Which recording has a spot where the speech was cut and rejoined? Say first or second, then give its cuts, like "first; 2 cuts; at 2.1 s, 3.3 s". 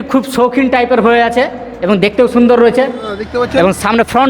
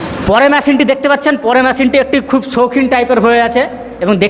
first; 1 cut; at 3.0 s